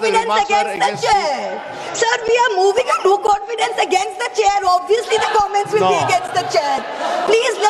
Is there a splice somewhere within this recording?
no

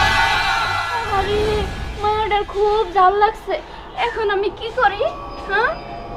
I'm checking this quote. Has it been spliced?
no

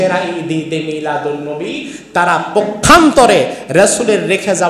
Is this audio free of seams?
yes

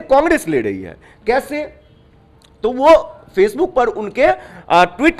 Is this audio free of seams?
yes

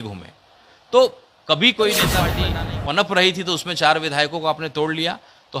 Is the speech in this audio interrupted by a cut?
yes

